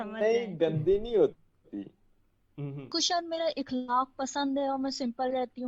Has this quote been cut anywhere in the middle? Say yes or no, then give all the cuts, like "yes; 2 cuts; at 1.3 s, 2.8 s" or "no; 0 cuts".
yes; 1 cut; at 2.9 s